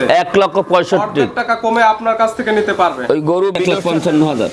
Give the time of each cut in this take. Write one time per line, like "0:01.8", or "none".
0:03.6